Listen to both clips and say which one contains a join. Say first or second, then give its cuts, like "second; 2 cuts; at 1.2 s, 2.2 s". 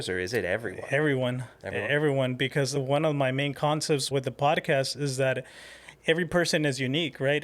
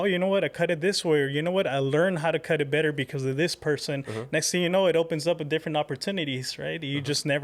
first; 2 cuts; at 2.8 s, 4.1 s